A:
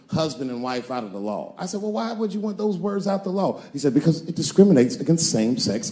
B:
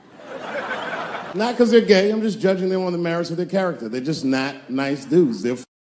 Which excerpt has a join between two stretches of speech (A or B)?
B